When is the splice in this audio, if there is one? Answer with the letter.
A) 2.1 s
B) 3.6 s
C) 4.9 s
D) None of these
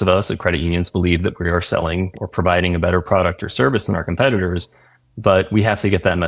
A